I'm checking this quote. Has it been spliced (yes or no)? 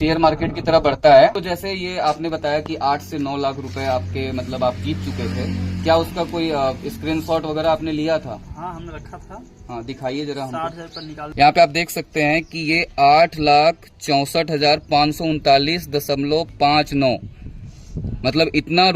yes